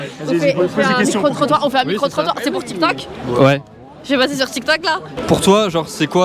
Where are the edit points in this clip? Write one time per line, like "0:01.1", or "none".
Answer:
0:05.1